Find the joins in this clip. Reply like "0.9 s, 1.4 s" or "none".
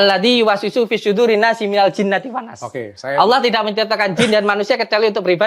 none